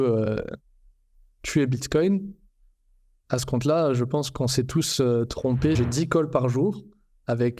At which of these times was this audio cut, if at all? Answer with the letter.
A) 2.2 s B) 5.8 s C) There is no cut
B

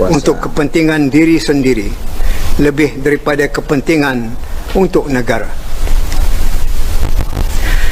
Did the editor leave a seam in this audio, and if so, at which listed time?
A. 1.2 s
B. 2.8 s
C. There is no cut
C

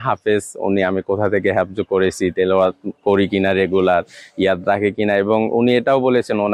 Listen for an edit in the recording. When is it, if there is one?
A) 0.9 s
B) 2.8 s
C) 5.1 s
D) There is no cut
D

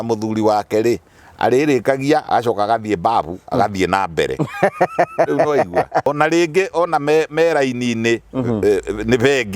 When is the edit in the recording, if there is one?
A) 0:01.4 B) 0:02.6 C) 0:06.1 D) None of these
C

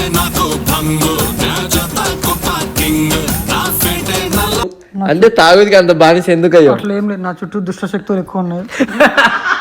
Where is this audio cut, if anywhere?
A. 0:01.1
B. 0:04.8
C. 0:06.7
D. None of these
B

